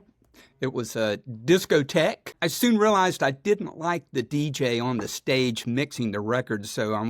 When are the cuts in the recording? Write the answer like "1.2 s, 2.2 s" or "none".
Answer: 2.3 s